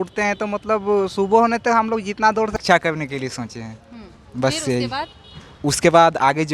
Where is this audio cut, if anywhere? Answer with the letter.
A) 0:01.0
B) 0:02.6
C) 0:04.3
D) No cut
B